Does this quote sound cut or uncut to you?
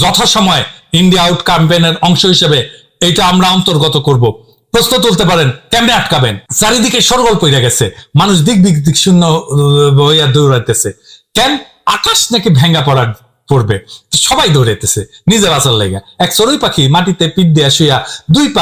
cut